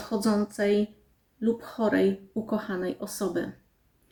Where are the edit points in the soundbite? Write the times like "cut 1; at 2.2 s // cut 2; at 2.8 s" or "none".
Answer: none

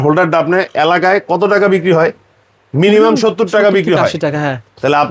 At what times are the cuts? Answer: none

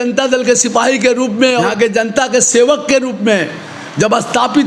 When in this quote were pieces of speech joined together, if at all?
cut 1; at 1.7 s

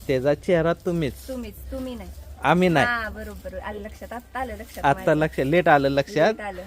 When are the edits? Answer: none

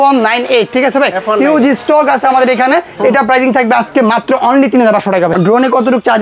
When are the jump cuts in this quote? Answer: cut 1; at 5.3 s

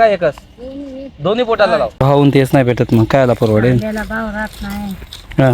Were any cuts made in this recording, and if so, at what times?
cut 1; at 2.0 s

